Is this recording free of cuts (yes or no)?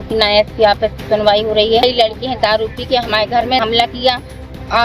no